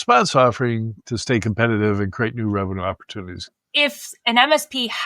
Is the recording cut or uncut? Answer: cut